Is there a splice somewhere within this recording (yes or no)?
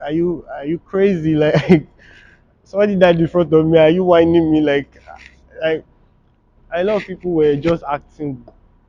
no